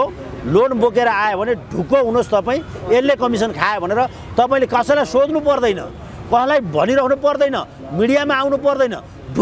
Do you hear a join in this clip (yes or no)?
no